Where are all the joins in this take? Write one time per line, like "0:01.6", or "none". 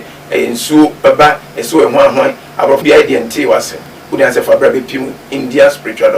0:02.8